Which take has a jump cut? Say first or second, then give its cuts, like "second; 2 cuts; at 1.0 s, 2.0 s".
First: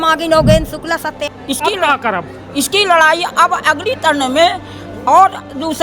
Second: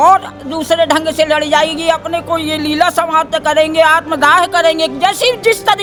first; 1 cut; at 1.3 s